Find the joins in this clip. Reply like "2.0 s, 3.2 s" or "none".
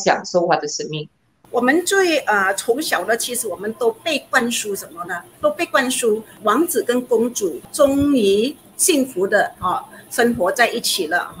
1.3 s, 6.3 s, 7.6 s, 8.7 s